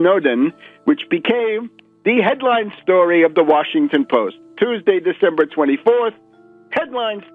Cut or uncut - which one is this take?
uncut